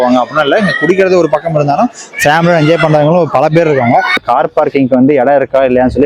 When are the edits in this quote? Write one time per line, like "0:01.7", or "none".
0:04.2